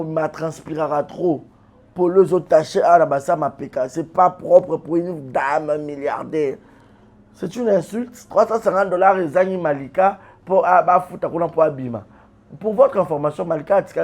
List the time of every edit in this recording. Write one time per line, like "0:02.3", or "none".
0:08.2